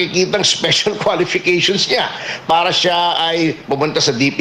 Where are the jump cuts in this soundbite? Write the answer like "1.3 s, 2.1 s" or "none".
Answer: none